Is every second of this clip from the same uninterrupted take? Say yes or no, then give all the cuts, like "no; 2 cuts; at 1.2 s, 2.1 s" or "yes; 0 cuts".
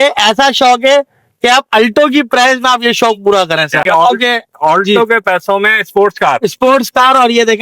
no; 1 cut; at 3.8 s